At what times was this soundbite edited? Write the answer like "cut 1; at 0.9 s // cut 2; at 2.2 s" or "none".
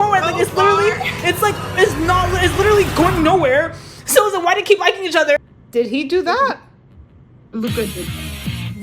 cut 1; at 5.5 s